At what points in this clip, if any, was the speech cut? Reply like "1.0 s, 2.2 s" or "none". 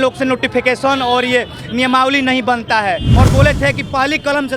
3.1 s

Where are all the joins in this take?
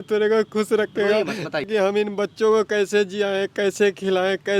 1.7 s

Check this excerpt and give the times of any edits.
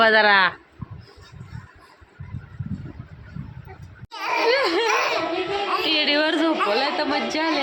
4.1 s

